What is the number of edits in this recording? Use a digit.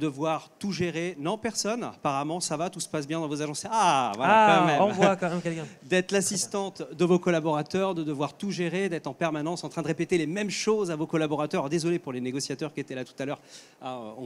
0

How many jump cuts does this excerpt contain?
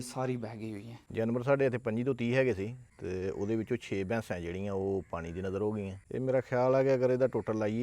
2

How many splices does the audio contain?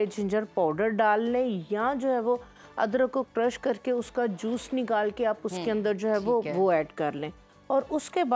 0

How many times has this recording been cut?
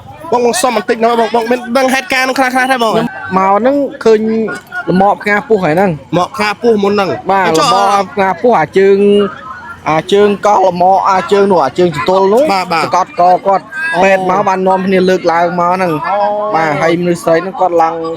1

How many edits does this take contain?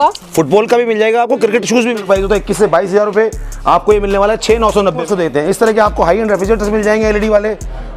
2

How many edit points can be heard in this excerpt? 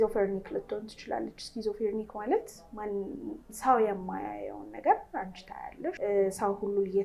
1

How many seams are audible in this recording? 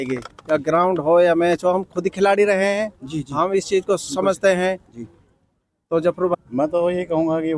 1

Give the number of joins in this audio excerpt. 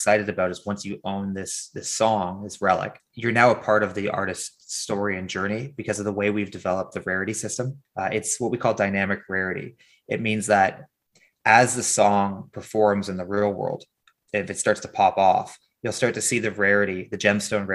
2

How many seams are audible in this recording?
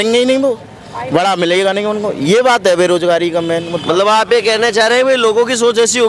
0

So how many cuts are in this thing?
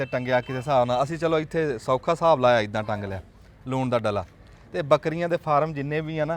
0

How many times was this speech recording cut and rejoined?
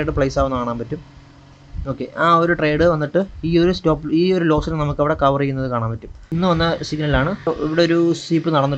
2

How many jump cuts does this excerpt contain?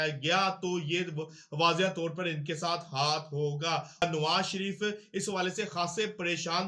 1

